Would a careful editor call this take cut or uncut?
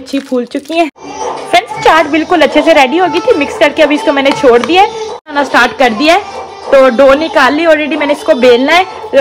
cut